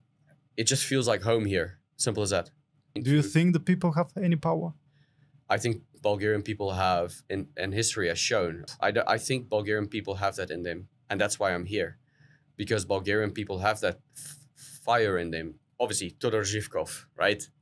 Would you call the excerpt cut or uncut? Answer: cut